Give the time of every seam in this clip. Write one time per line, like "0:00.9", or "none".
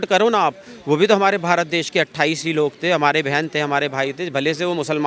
none